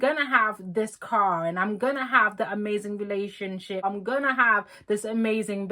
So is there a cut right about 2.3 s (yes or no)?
no